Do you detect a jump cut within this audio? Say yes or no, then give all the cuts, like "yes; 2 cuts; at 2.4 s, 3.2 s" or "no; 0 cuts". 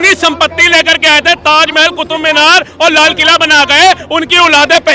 no; 0 cuts